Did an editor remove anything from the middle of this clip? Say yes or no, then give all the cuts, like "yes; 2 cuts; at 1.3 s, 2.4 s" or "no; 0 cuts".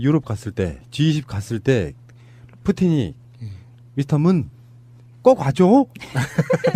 yes; 1 cut; at 3.0 s